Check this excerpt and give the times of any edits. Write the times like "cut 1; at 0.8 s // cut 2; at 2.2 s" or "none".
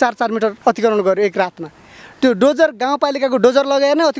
none